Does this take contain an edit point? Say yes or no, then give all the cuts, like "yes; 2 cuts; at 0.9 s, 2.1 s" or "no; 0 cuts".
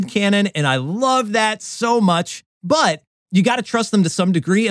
no; 0 cuts